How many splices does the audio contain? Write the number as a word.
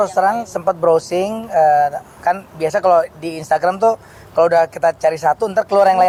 zero